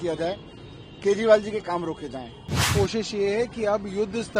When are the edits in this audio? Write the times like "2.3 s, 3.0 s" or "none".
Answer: 2.7 s

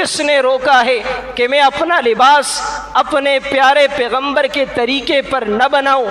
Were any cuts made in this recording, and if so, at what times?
none

